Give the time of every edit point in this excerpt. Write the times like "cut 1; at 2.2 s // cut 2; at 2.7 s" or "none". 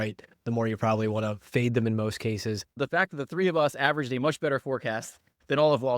cut 1; at 2.7 s